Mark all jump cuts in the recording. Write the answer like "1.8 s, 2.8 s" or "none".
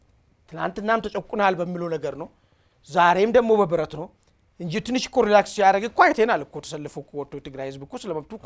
none